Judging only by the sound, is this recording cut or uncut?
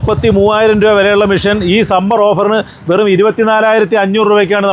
uncut